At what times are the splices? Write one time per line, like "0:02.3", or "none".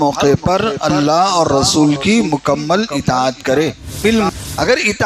0:04.0